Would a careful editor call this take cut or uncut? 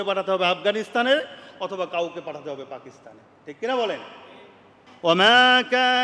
cut